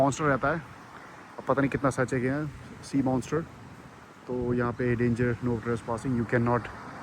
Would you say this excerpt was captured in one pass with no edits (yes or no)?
yes